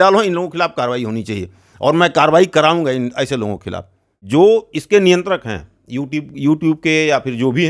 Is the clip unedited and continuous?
no; 1 cut; at 4.1 s

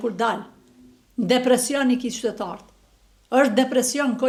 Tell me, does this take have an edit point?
no; 0 cuts

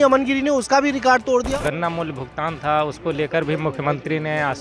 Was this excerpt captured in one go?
no; 1 cut; at 1.5 s

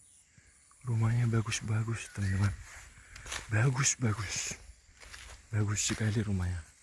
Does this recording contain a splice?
no; 0 cuts

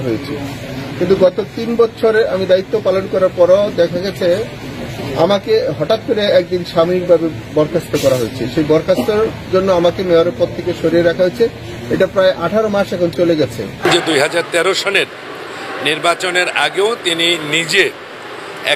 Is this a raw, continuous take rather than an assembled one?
no; 1 cut; at 13.7 s

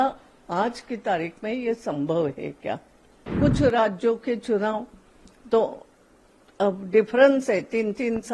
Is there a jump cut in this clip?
yes; 1 cut; at 3.3 s

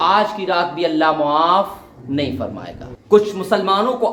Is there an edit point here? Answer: no; 0 cuts

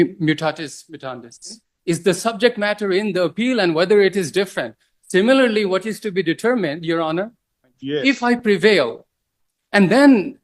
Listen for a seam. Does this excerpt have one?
yes; 2 cuts; at 1.7 s, 7.8 s

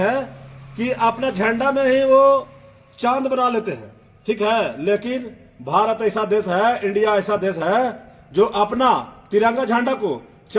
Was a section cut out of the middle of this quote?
no; 0 cuts

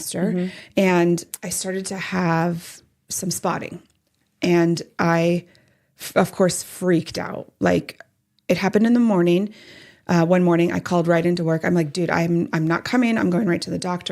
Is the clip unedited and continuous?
no; 1 cut; at 1.3 s

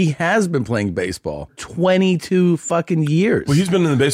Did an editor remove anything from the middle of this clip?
yes; 1 cut; at 1.6 s

